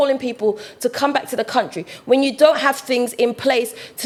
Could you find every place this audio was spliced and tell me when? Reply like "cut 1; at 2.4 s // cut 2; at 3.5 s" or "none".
none